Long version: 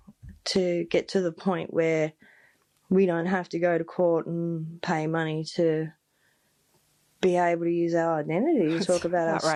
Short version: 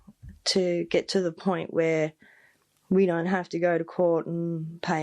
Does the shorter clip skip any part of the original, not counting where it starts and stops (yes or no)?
no